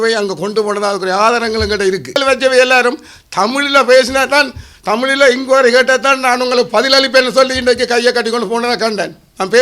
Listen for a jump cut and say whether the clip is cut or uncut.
cut